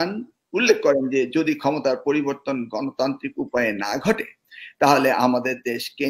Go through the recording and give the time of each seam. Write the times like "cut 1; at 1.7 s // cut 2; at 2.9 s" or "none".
none